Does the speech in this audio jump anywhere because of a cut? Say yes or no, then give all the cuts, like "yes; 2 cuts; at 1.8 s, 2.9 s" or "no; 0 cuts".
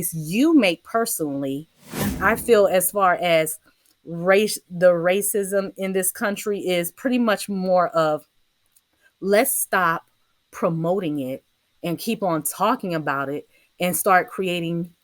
yes; 1 cut; at 2.1 s